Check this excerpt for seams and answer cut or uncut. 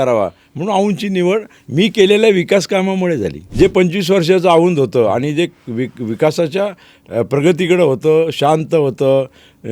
cut